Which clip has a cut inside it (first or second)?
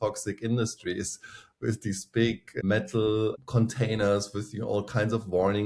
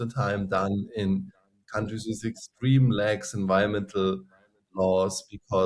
first